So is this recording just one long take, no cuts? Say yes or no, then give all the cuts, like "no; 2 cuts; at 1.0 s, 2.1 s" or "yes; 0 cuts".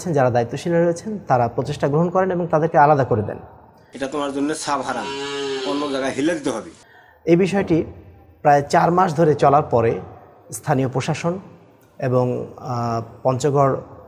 yes; 0 cuts